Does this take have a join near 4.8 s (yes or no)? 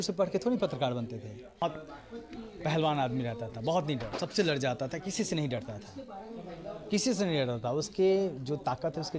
no